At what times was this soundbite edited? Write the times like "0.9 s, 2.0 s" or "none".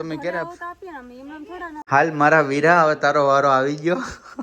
1.8 s